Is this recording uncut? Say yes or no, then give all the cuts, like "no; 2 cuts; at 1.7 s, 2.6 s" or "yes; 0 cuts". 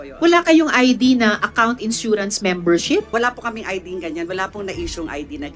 no; 1 cut; at 3.1 s